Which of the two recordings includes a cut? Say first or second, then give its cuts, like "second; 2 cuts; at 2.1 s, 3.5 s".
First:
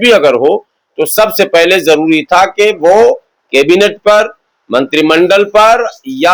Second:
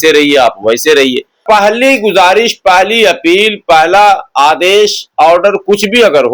second; 1 cut; at 1.4 s